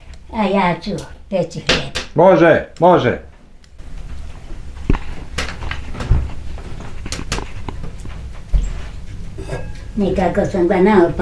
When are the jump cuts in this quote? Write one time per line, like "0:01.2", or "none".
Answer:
none